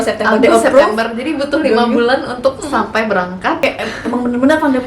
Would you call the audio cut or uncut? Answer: cut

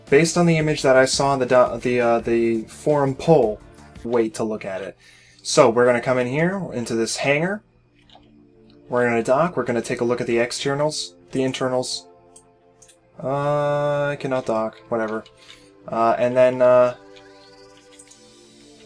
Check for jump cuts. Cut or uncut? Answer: uncut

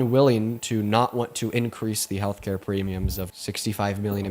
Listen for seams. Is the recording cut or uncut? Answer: cut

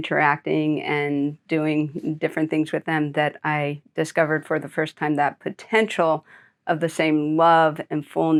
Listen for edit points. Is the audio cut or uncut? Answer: uncut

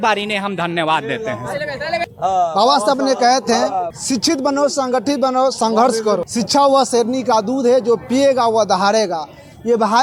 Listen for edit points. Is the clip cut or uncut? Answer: uncut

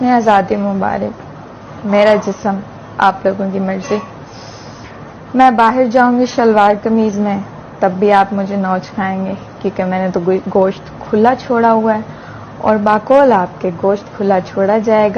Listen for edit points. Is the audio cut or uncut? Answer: uncut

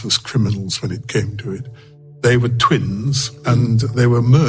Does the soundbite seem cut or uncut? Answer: cut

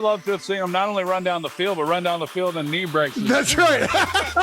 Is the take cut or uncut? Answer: cut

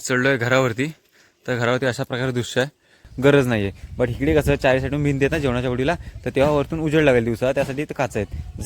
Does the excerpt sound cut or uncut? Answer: cut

